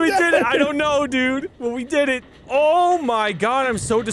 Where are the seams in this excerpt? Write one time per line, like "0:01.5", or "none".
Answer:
0:02.4